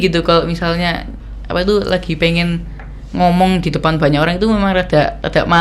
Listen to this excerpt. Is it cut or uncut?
uncut